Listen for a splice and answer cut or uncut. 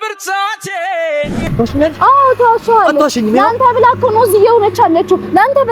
cut